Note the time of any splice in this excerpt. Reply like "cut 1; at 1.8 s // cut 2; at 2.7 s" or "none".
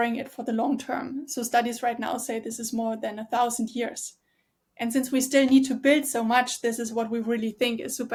none